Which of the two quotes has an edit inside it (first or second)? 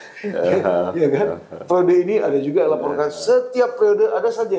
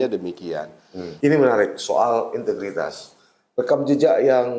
second